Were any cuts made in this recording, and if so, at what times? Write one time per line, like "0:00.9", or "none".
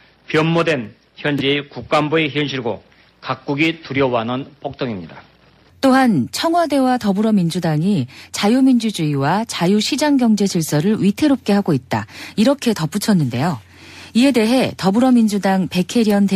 0:08.6